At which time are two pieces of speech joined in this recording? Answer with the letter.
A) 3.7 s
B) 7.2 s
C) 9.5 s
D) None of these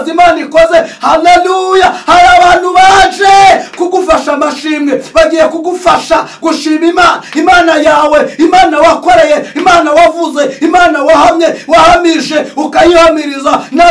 D